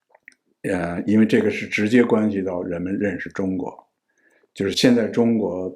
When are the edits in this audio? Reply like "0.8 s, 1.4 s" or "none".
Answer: none

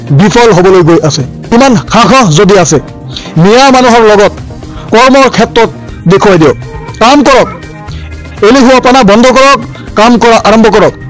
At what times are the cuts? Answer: 1.3 s

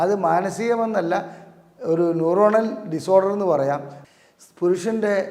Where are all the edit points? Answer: 3.9 s

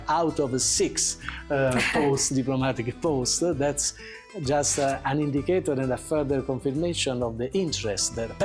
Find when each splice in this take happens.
none

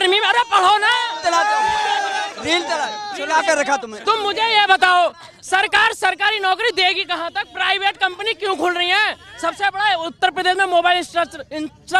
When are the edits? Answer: none

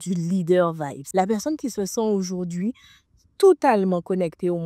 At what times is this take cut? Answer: 0.9 s

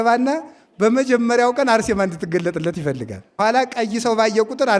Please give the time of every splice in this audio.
3.3 s

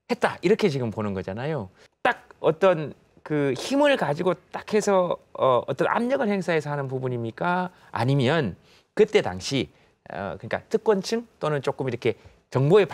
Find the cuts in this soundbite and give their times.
none

